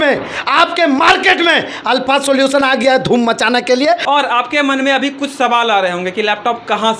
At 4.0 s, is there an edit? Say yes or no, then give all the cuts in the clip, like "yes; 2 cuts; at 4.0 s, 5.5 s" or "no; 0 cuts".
yes; 1 cut; at 4.0 s